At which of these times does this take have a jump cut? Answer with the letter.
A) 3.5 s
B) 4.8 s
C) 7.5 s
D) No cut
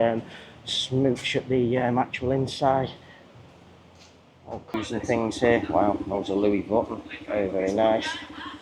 B